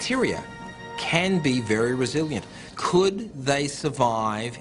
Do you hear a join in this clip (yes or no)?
yes